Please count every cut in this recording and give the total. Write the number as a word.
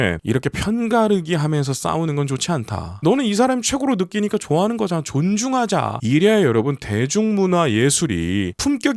two